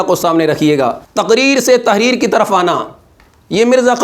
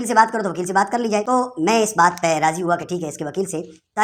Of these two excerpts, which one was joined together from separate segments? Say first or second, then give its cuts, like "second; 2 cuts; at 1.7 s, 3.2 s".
first; 1 cut; at 1.1 s